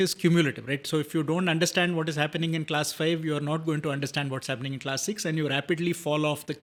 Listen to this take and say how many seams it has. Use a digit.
0